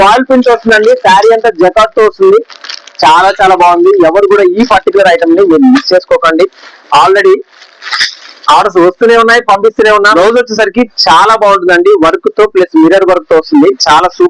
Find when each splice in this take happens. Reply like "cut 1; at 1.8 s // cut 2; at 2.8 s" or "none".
cut 1; at 10.0 s